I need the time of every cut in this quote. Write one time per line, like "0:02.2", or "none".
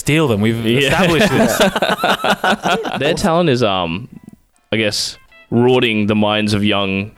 0:02.9